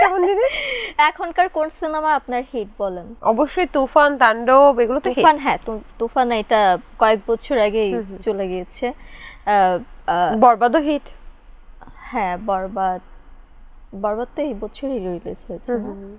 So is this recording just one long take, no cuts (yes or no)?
yes